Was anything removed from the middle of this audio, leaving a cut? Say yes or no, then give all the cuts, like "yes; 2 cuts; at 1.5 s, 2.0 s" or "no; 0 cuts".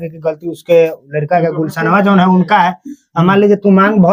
no; 0 cuts